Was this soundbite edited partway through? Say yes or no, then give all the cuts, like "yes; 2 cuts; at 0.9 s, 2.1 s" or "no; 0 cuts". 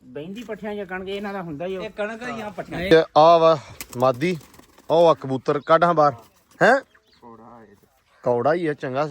yes; 1 cut; at 2.9 s